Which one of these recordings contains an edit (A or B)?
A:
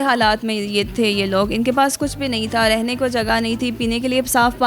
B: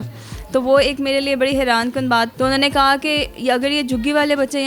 B